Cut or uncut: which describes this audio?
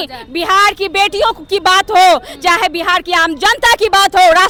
uncut